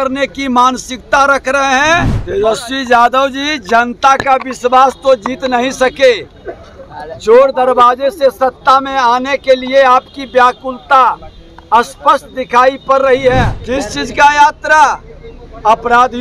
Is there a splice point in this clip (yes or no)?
yes